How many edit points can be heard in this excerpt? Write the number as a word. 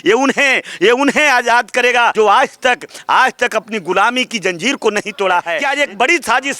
two